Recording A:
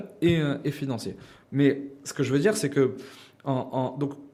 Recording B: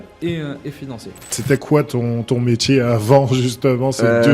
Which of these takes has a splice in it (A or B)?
B